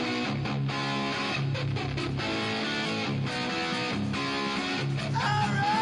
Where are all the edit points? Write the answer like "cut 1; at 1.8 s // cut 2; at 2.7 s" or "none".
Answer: none